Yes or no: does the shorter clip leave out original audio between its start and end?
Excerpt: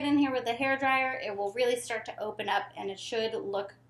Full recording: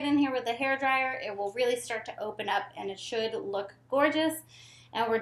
no